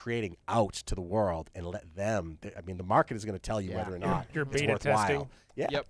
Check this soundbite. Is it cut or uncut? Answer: uncut